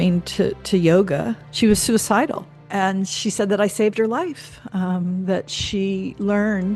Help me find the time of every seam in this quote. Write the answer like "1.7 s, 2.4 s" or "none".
1.4 s, 2.5 s

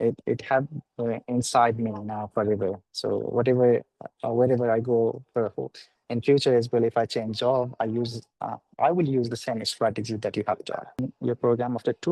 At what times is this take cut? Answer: 11.1 s

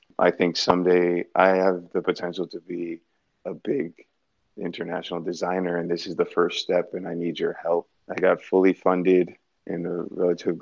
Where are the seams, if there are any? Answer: 8.0 s

